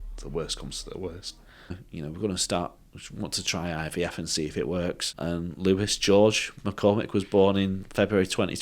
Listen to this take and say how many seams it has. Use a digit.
2